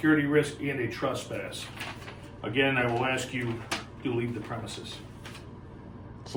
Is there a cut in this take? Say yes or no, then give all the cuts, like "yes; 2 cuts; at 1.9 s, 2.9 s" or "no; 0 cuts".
no; 0 cuts